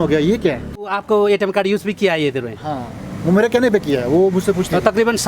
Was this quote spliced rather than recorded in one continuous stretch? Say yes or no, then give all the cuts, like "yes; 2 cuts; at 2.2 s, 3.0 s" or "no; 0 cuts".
yes; 1 cut; at 1.0 s